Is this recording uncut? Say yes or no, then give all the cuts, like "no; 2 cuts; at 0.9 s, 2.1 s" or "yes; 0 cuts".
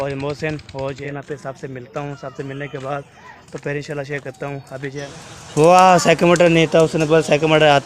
no; 2 cuts; at 1.0 s, 5.1 s